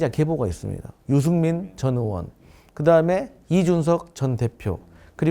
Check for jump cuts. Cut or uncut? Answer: cut